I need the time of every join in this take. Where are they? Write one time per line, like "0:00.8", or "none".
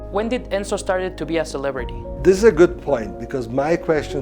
none